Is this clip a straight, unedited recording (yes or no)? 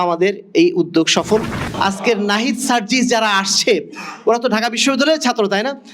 no